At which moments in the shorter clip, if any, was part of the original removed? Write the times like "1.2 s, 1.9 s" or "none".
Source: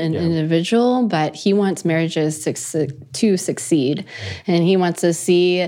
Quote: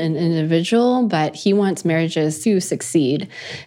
2.4 s